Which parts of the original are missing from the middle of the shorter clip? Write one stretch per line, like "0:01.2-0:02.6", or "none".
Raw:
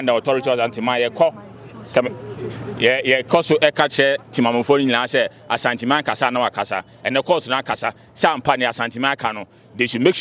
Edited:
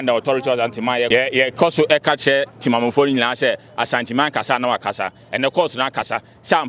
0:01.1-0:02.8